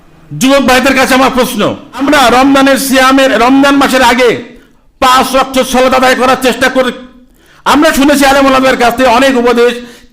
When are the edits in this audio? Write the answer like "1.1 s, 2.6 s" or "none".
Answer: 2.0 s